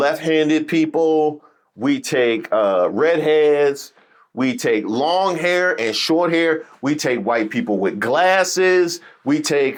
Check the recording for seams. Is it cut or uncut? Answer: uncut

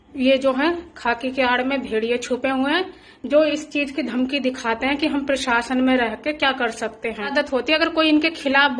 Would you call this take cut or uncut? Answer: cut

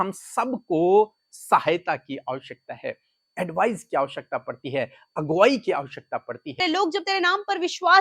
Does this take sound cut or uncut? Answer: cut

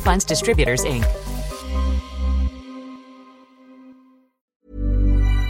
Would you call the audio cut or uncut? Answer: cut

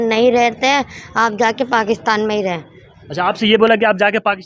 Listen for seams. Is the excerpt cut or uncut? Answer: uncut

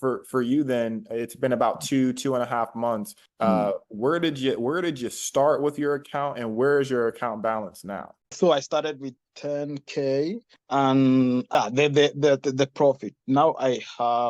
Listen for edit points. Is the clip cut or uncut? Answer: cut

